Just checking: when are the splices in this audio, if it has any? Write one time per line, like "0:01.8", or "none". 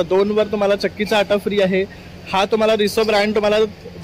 none